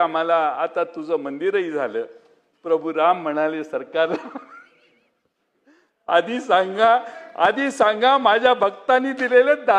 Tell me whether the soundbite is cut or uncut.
uncut